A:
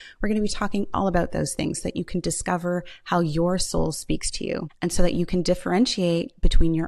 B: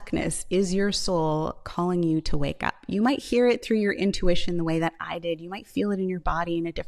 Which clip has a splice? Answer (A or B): A